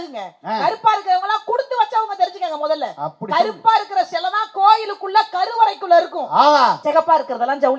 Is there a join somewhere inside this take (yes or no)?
yes